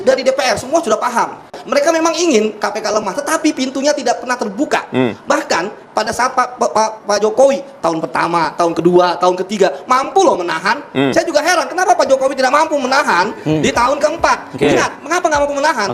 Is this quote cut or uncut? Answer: uncut